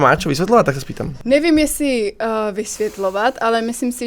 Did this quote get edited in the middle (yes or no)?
no